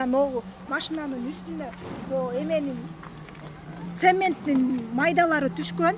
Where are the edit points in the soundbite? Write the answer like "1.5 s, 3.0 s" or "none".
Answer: none